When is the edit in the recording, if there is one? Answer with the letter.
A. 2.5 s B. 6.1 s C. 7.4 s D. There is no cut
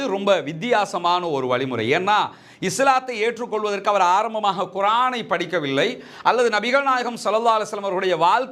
D